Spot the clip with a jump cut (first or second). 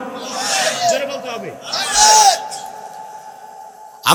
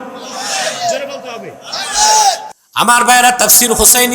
second